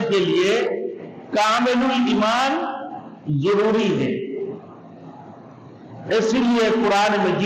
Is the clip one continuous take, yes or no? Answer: yes